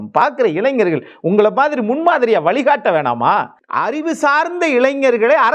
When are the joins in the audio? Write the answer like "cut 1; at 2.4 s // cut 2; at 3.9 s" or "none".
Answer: cut 1; at 3.6 s